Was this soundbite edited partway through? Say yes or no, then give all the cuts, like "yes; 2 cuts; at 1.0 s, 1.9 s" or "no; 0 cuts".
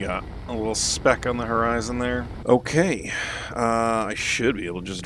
yes; 1 cut; at 2.3 s